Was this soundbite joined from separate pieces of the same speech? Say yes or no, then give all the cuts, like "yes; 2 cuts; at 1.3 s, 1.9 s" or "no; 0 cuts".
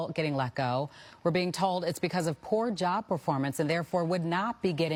no; 0 cuts